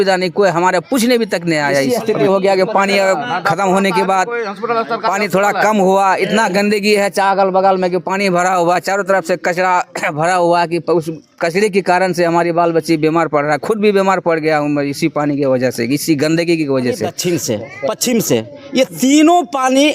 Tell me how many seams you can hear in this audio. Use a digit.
2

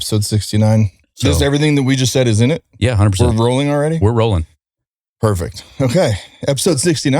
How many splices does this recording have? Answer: 1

